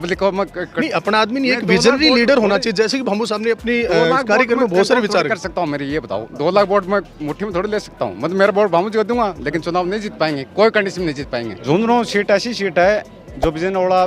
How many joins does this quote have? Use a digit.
1